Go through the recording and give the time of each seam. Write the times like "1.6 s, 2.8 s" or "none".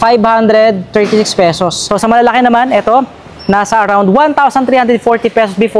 1.7 s